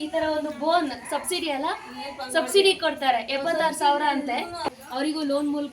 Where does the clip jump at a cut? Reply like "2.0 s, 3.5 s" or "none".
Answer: 4.7 s